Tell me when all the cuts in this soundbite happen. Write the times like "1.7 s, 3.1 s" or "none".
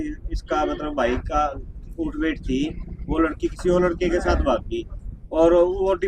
none